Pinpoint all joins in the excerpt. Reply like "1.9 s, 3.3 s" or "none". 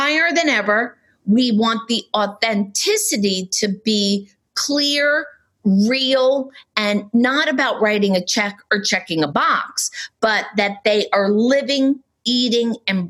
none